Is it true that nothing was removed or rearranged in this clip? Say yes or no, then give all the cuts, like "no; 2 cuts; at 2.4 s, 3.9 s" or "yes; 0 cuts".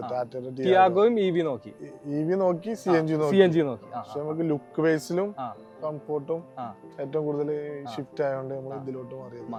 yes; 0 cuts